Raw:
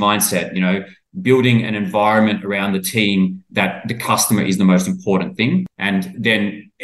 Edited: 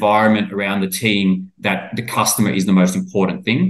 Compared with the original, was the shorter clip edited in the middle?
no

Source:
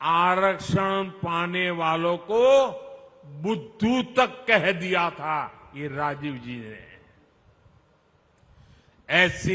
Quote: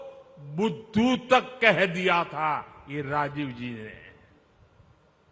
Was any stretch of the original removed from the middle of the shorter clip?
no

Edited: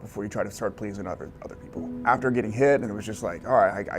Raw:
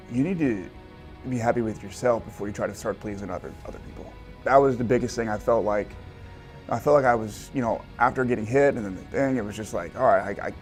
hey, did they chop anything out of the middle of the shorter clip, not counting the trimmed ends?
yes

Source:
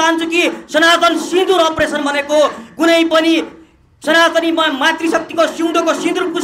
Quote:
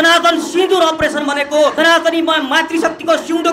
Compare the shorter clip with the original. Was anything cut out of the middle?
yes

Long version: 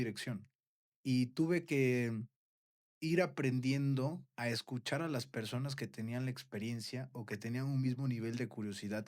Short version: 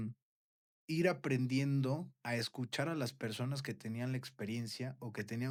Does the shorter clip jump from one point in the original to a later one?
no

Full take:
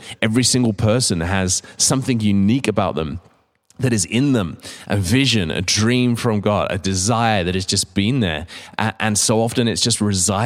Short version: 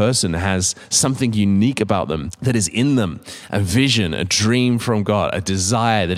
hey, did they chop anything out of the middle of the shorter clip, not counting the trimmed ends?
yes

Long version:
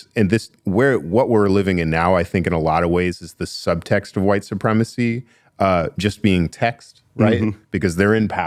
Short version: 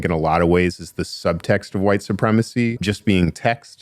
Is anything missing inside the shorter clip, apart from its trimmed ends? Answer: yes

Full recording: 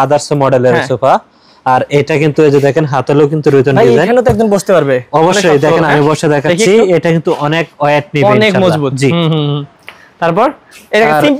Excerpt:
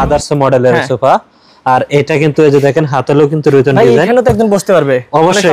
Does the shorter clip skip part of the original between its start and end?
no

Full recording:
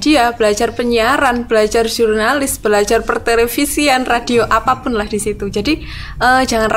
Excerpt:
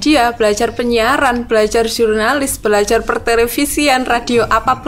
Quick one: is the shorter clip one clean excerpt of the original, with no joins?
yes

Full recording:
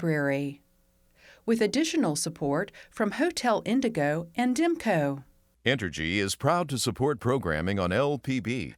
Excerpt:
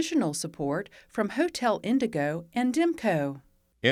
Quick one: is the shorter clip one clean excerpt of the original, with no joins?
yes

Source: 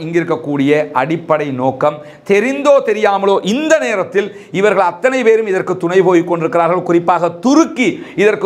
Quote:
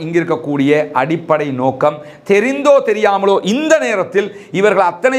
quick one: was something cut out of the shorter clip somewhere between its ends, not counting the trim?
no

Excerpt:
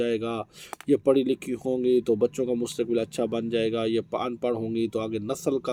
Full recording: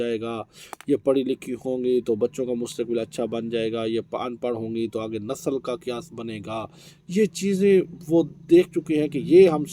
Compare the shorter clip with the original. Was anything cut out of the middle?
no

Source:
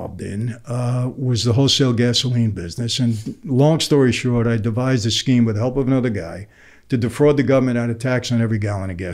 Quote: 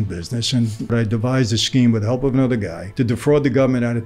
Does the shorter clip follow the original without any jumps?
no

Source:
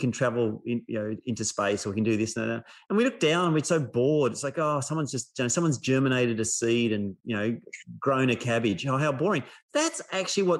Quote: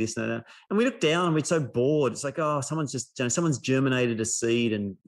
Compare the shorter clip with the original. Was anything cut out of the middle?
no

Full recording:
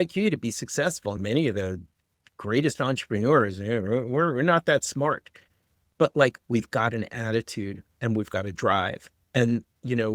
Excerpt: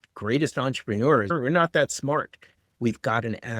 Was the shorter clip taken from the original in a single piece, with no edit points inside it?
no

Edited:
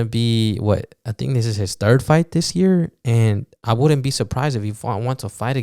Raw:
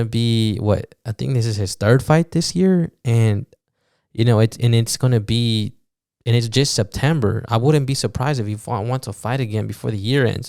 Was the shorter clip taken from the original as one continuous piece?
no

